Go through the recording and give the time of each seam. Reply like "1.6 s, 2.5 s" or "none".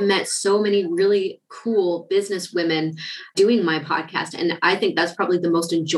3.3 s